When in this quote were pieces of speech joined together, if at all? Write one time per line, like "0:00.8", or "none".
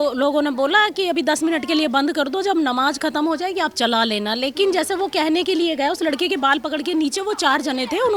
none